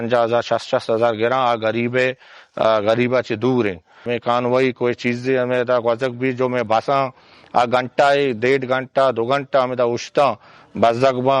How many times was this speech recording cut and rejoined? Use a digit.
1